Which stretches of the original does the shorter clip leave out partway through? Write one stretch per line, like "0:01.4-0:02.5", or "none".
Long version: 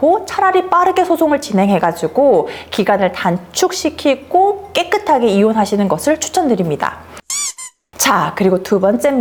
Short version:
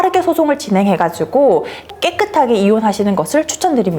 0:02.7-0:04.6